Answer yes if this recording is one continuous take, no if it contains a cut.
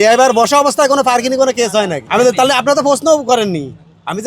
no